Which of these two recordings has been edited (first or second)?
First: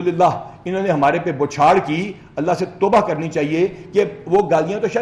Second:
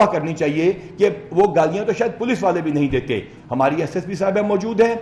second